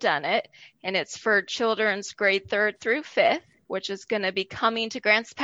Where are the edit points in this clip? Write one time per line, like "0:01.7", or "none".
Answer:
0:03.5